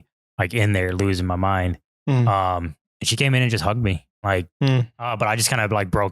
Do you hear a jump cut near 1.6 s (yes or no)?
no